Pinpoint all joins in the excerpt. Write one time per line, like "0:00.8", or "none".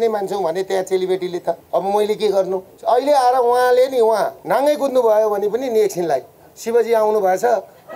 0:01.6
0:02.7
0:04.4